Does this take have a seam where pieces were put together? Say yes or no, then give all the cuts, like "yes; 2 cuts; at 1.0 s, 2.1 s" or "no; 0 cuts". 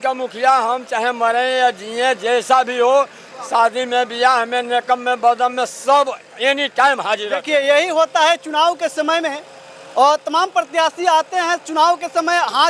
yes; 1 cut; at 7.4 s